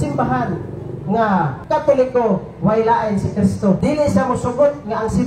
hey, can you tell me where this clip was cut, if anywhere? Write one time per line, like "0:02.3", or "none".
0:01.6
0:03.8